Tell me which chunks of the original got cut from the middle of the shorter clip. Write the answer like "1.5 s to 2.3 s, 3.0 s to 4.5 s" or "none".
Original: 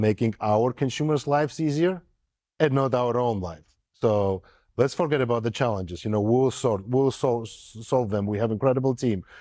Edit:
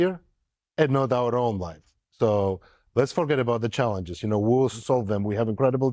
6.6 s to 7.8 s

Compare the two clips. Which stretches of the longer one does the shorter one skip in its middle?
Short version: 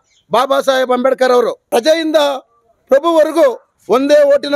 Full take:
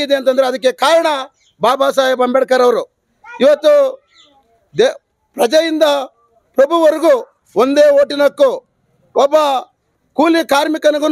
2.9 s to 5.3 s

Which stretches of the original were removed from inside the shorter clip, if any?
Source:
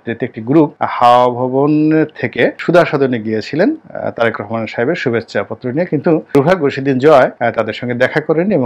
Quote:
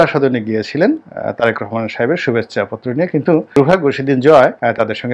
none

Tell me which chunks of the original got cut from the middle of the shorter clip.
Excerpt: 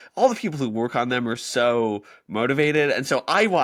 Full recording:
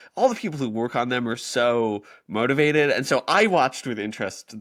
none

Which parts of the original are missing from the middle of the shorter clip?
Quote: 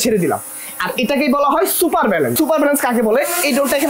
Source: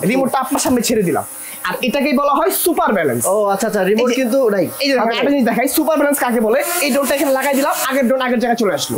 3.2 s to 5.7 s

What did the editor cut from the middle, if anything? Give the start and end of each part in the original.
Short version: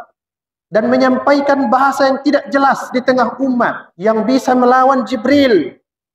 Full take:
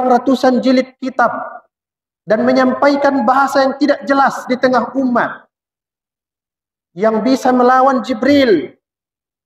5.4 s to 6.8 s

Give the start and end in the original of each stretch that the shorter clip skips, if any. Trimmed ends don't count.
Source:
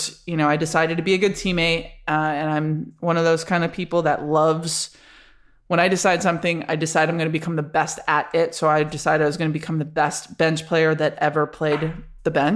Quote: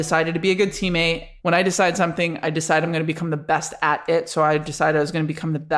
1.9 s to 5.5 s

